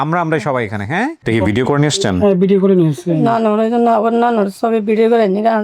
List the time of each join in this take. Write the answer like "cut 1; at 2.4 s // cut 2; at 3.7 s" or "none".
cut 1; at 1.2 s

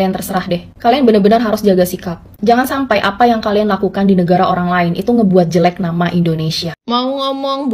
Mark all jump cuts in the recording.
cut 1; at 6.7 s

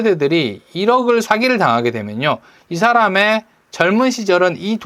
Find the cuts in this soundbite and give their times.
none

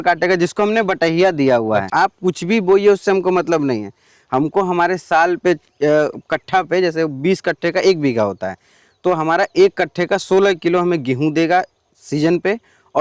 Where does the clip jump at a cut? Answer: cut 1; at 1.9 s

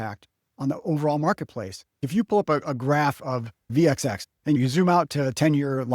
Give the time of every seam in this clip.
cut 1; at 1.9 s // cut 2; at 3.6 s // cut 3; at 4.5 s

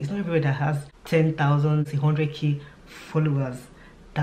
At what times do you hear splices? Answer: cut 1; at 0.9 s // cut 2; at 1.9 s

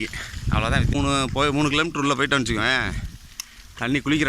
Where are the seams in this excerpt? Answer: cut 1; at 0.9 s

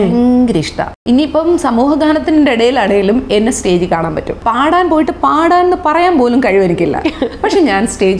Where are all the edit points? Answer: cut 1; at 1.0 s // cut 2; at 4.4 s

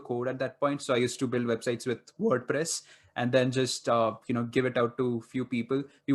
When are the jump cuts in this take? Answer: none

